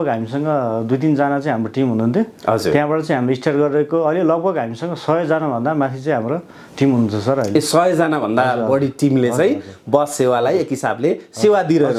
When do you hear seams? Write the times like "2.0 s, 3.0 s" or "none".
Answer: none